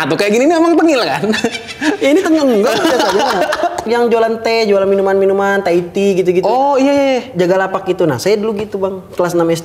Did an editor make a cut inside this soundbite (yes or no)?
yes